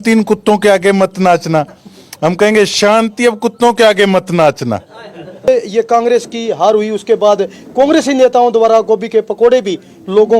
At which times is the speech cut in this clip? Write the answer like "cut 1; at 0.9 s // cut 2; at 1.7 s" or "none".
cut 1; at 5.5 s